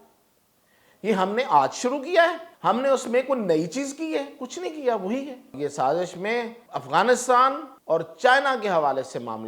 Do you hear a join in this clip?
yes; 4 cuts; at 2.5 s, 5.5 s, 6.6 s, 7.7 s

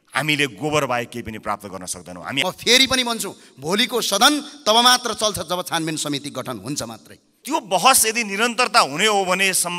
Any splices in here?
yes; 2 cuts; at 2.4 s, 7.3 s

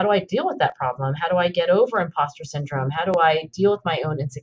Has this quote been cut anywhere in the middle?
no; 0 cuts

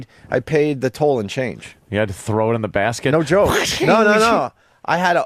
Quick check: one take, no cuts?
yes; 0 cuts

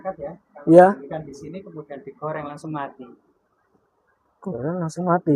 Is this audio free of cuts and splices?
yes; 0 cuts

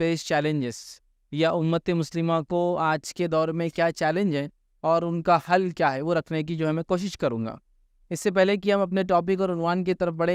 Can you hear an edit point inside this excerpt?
no; 0 cuts

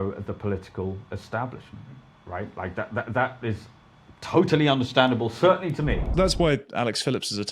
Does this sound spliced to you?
yes; 1 cut; at 6.1 s

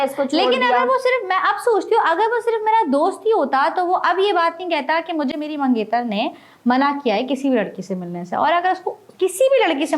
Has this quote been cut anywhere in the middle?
no; 0 cuts

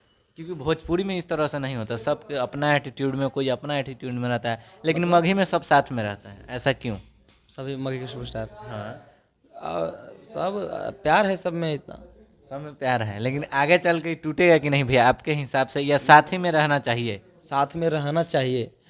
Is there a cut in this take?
no; 0 cuts

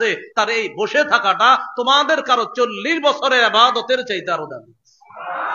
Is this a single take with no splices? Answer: yes; 0 cuts

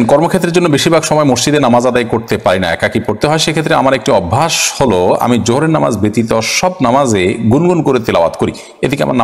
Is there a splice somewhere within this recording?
no; 0 cuts

